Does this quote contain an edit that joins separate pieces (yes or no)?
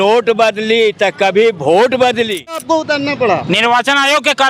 yes